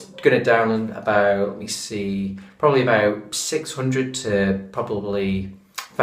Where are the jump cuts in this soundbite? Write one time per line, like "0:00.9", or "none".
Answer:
0:03.2